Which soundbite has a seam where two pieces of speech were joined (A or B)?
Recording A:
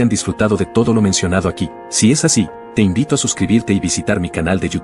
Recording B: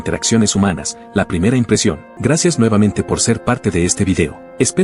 B